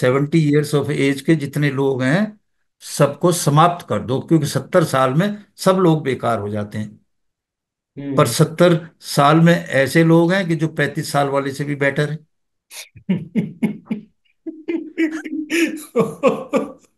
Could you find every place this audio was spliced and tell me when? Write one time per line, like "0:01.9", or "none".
none